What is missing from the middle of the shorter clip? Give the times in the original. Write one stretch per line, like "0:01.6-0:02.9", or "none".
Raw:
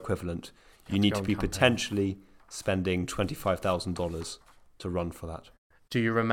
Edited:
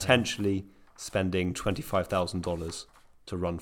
none